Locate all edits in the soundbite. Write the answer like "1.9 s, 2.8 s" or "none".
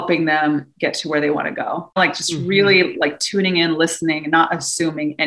2.0 s